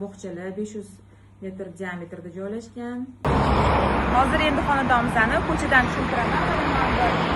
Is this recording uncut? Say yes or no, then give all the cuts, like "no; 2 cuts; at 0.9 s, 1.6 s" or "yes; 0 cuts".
no; 1 cut; at 3.2 s